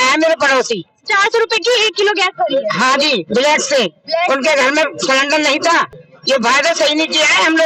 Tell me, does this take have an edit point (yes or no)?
yes